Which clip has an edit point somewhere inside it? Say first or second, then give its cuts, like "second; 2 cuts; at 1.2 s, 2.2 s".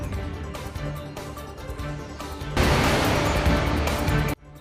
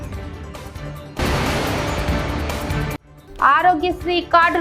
second; 2 cuts; at 1.2 s, 3.1 s